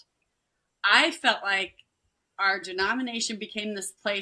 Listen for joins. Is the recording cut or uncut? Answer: cut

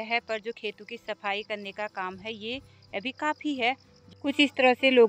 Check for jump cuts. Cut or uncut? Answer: cut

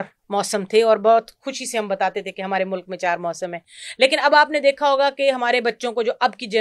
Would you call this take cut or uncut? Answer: uncut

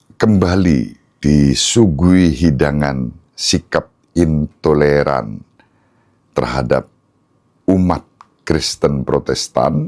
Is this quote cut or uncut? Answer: uncut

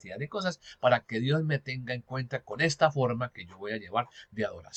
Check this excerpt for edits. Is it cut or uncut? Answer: uncut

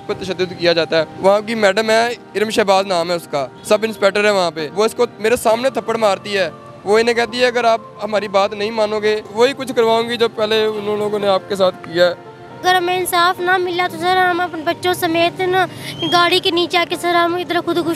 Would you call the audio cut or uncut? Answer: cut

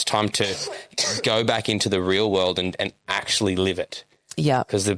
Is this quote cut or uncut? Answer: uncut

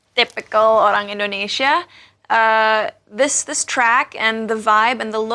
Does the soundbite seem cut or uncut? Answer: uncut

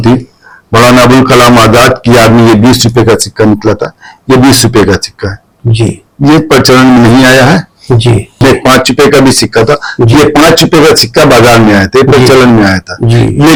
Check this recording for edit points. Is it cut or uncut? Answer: uncut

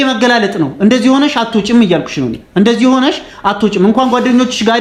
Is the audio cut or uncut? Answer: uncut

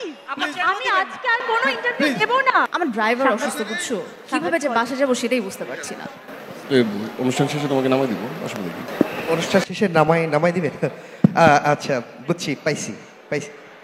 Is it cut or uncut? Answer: cut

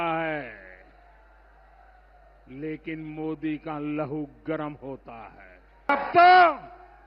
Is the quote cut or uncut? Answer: cut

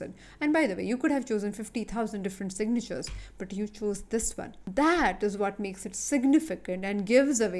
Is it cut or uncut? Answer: cut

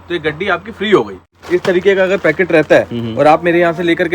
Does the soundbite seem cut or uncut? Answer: cut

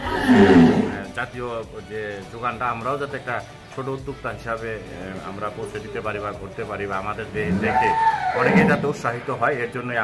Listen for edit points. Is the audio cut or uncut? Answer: uncut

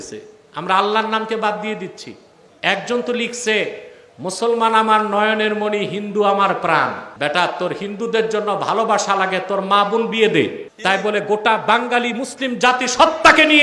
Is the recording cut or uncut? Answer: cut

